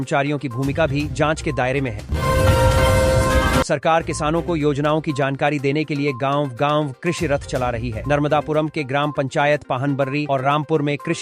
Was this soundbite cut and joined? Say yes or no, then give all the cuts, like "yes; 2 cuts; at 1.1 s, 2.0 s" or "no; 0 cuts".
no; 0 cuts